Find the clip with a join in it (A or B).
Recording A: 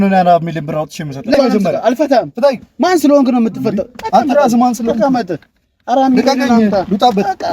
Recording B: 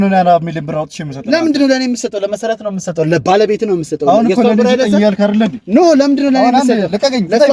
A